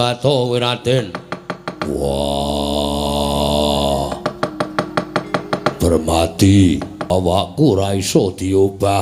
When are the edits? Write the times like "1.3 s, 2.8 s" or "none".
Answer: 7.1 s